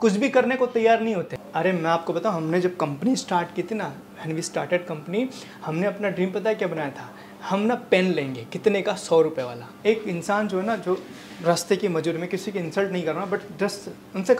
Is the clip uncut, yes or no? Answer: no